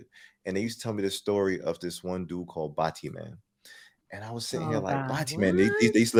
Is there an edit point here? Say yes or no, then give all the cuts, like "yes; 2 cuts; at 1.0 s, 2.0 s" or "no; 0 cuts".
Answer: no; 0 cuts